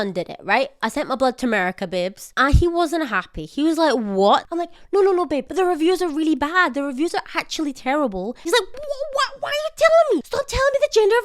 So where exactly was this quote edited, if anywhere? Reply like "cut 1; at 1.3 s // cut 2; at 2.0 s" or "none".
cut 1; at 4.5 s // cut 2; at 5.5 s // cut 3; at 8.5 s // cut 4; at 10.3 s